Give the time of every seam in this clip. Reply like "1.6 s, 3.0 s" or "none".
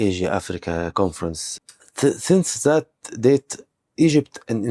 1.4 s